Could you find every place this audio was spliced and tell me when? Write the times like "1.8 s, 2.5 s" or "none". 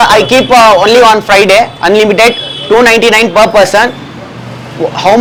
none